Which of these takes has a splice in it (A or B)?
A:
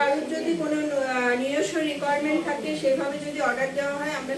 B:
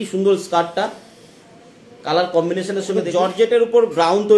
B